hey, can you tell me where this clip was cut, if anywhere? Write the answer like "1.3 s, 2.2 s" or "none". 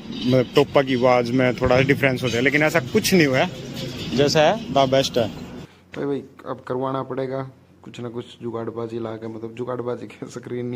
5.5 s